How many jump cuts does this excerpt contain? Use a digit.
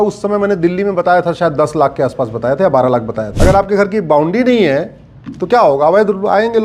1